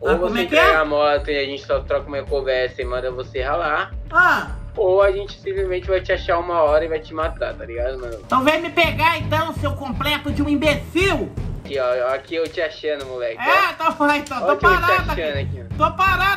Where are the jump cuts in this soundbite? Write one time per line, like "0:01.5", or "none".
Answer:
0:07.6
0:11.6